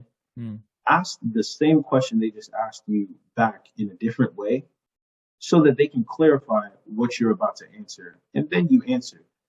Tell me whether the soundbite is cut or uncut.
uncut